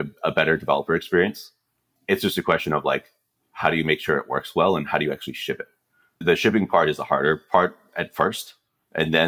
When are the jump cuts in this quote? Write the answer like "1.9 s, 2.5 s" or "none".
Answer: 1.8 s, 6.2 s